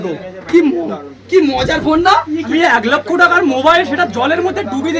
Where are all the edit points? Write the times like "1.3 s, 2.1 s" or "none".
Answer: 2.5 s